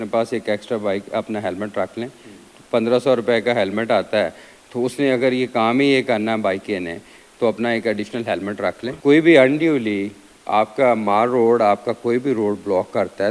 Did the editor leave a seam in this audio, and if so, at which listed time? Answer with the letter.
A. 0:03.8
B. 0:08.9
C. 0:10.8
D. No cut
B